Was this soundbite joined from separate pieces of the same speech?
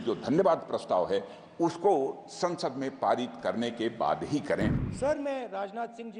yes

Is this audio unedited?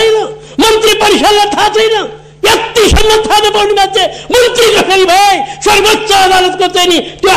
yes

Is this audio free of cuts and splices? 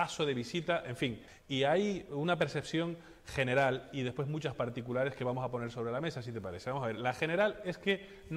no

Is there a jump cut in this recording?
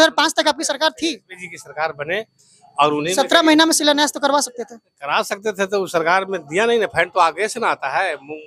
no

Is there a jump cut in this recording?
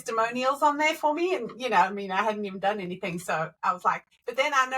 yes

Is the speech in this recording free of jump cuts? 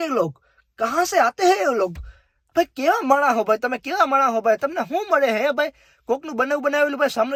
yes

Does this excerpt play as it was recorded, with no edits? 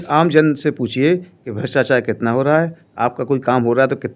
yes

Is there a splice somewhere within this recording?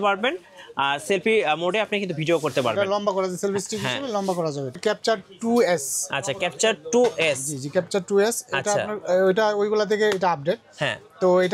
yes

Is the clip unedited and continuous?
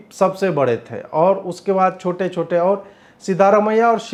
yes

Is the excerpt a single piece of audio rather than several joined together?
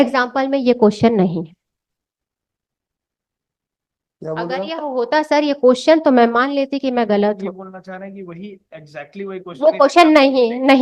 yes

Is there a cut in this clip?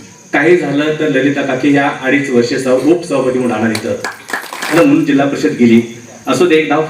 yes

